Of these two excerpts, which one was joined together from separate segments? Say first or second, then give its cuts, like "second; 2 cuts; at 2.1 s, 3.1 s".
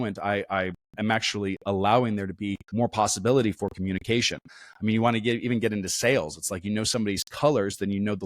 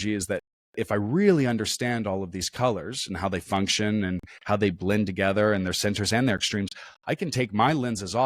first; 1 cut; at 2.6 s